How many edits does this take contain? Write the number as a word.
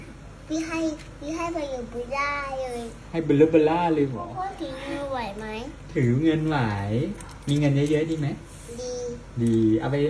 one